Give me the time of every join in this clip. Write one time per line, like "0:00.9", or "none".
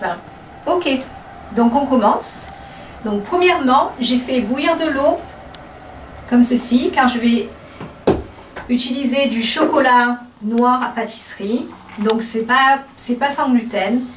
0:06.6